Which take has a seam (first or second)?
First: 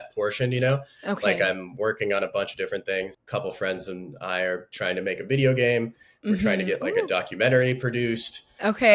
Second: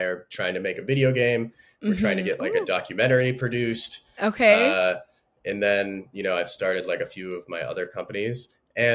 first